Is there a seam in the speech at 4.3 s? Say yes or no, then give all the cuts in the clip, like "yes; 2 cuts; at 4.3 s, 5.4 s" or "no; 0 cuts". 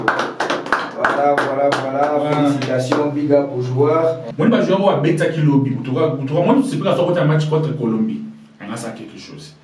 yes; 1 cut; at 4.3 s